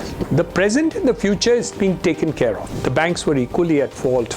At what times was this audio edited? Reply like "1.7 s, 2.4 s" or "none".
2.7 s